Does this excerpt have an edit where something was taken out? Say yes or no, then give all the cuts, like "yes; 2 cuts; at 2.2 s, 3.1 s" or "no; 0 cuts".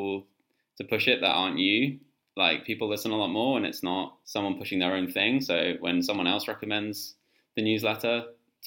yes; 1 cut; at 4.2 s